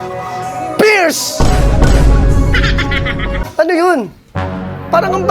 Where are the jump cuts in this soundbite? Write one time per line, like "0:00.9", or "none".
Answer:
0:03.4

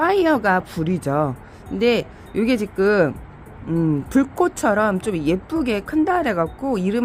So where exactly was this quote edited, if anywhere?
none

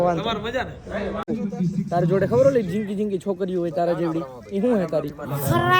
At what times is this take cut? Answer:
0:01.2

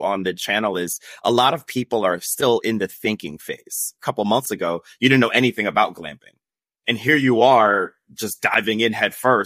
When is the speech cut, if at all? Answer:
0:04.0

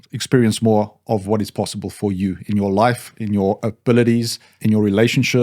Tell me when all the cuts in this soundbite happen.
0:04.5

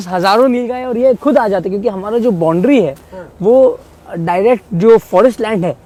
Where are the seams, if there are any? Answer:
none

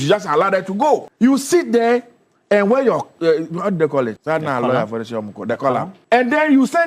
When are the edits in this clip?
0:04.2
0:05.9

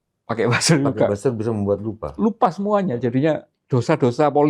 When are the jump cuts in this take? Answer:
0:03.5

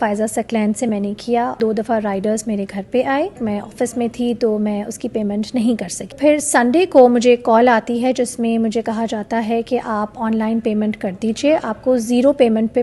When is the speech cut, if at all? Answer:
0:01.6
0:03.4
0:06.1

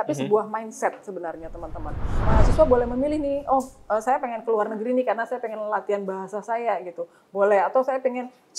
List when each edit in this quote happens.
0:02.1

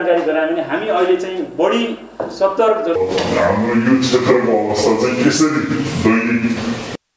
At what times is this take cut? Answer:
0:03.0

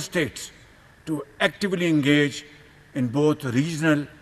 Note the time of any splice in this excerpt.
none

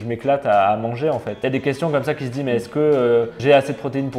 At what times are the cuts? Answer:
0:01.3
0:03.4

